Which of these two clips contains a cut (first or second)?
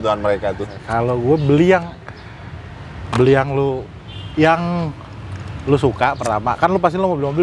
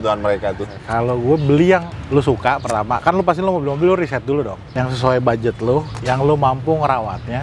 second